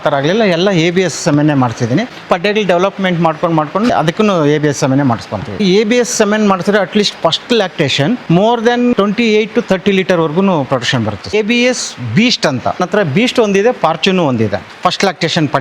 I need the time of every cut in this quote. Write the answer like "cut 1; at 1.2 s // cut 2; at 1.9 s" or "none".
cut 1; at 2.1 s // cut 2; at 3.9 s // cut 3; at 5.6 s // cut 4; at 8.2 s // cut 5; at 8.9 s // cut 6; at 11.3 s // cut 7; at 12.8 s // cut 8; at 14.7 s